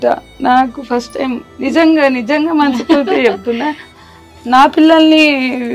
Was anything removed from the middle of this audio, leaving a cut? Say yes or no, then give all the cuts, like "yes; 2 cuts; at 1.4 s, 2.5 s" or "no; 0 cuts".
no; 0 cuts